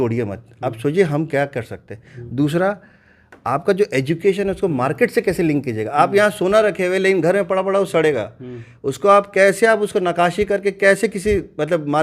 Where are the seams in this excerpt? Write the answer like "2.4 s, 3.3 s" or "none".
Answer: none